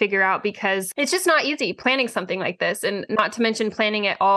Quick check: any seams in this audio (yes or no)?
yes